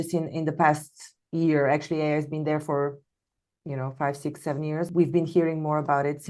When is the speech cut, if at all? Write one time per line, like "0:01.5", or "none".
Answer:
0:04.9